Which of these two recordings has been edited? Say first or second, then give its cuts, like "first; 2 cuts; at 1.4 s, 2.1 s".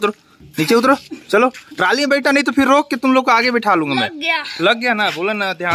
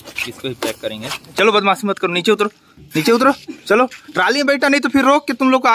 second; 1 cut; at 1.3 s